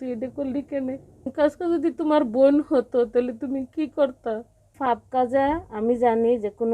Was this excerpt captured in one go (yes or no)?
no